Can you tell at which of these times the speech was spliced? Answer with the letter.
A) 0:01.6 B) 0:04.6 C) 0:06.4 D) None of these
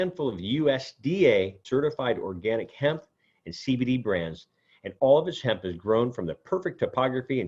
A